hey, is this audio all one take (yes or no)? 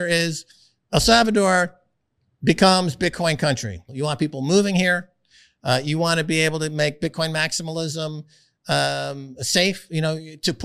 no